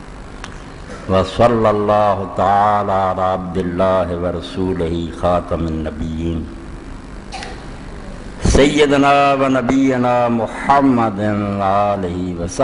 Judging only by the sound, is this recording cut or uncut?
uncut